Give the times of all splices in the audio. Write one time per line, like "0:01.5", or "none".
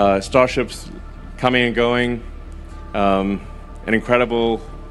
0:03.4